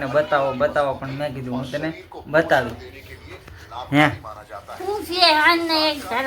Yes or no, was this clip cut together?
no